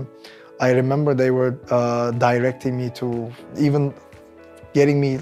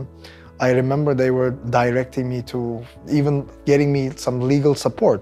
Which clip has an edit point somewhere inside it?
second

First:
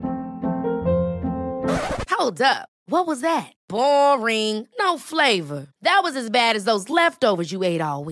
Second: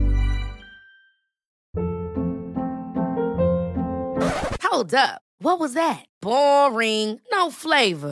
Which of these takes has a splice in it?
second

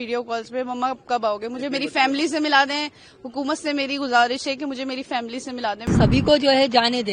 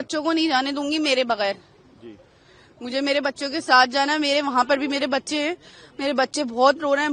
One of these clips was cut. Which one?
first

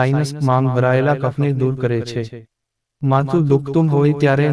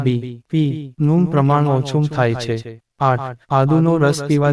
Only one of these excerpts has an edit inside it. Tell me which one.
second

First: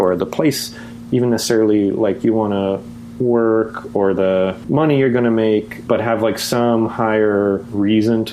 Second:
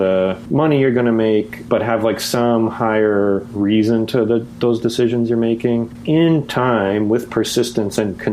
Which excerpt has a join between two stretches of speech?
second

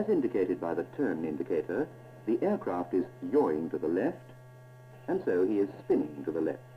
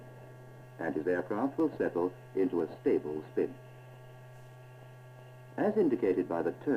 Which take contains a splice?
first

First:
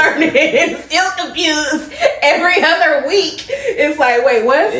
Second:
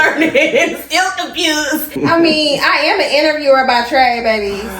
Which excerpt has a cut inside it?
second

